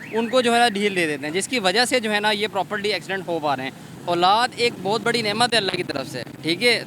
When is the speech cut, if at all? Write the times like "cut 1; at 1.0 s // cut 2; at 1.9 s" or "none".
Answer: cut 1; at 3.9 s

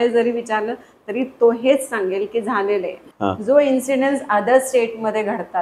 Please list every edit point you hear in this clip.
cut 1; at 3.0 s

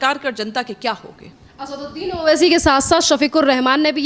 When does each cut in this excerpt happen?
none

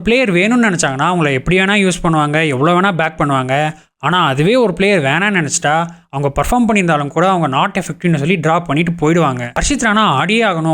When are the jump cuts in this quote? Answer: cut 1; at 9.6 s

